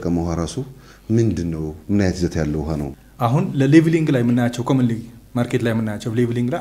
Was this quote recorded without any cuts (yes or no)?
no